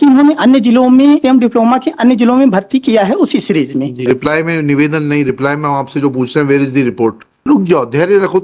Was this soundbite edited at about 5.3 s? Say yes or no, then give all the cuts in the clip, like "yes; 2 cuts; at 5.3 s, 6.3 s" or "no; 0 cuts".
no; 3 cuts; at 1.2 s, 4.0 s, 7.4 s